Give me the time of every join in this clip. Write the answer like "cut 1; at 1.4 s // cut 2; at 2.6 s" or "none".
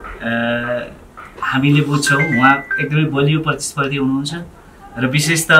none